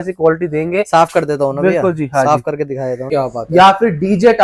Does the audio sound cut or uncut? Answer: cut